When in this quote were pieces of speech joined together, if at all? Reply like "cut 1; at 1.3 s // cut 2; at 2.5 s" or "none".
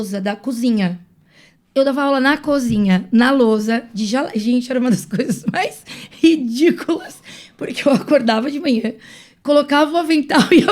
none